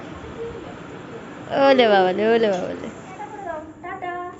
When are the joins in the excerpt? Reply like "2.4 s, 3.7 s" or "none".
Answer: 3.3 s